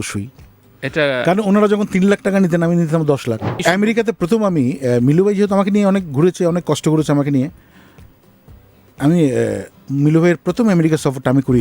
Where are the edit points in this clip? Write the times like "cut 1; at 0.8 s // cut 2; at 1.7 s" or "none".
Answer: cut 1; at 3.6 s